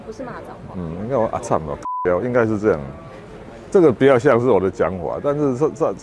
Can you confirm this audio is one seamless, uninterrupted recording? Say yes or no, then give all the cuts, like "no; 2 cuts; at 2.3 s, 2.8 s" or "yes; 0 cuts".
yes; 0 cuts